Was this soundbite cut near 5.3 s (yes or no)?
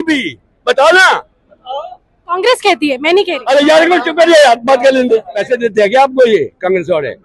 yes